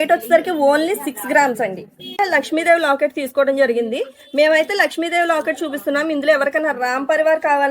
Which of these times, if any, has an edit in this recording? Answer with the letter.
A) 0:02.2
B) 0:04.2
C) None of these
A